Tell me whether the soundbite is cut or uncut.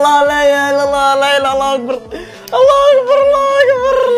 uncut